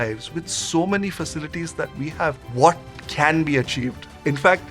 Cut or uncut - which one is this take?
uncut